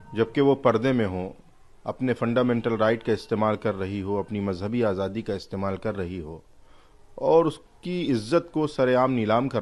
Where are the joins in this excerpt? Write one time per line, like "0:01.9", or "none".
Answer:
none

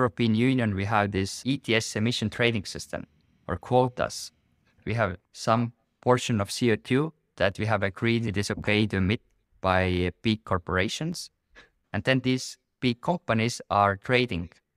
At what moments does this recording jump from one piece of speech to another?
0:01.3
0:04.9
0:08.2
0:11.7

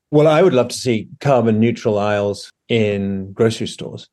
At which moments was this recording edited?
0:02.5

